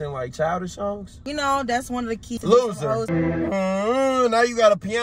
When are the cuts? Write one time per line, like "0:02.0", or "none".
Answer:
0:01.1
0:02.4
0:03.1